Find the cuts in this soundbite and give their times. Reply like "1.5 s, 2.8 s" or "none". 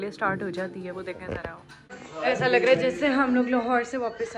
2.0 s